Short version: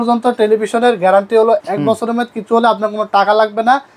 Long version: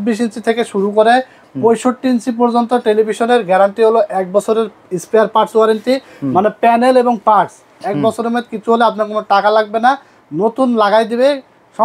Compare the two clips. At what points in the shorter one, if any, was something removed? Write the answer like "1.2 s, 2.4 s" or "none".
1.6 s